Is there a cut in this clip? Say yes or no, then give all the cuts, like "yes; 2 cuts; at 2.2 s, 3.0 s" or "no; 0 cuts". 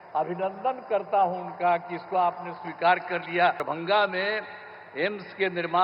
yes; 1 cut; at 3.6 s